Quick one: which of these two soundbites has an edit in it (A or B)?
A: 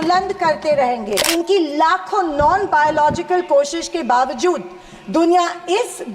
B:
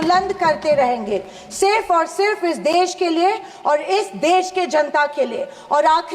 A